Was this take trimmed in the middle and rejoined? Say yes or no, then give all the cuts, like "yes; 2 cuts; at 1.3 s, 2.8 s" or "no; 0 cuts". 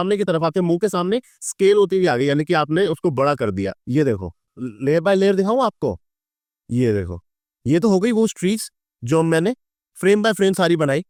no; 0 cuts